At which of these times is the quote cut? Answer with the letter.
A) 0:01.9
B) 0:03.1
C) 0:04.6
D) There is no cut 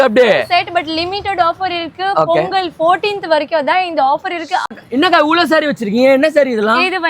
C